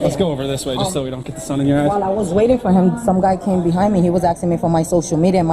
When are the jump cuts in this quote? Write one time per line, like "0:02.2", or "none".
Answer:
none